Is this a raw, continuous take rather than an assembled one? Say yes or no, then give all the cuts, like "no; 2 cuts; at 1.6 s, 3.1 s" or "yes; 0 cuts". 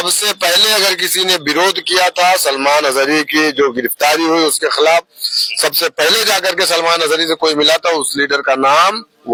yes; 0 cuts